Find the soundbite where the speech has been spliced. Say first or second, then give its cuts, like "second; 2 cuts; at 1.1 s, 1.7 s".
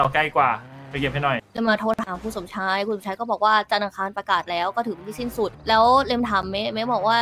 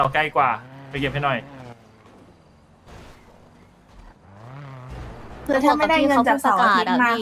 first; 2 cuts; at 1.5 s, 5.6 s